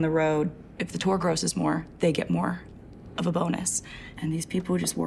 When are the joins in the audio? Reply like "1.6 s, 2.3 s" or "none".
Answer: none